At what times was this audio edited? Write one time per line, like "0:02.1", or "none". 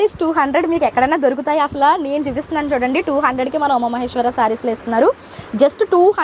none